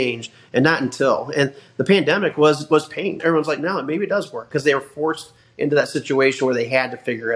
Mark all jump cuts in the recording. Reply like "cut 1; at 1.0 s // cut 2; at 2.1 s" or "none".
cut 1; at 3.2 s